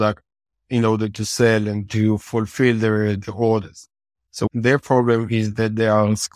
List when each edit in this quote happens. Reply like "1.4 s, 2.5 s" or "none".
4.5 s